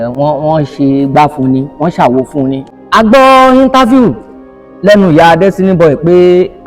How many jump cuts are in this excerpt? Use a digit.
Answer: 1